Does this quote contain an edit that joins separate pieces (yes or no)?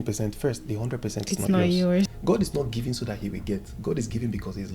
yes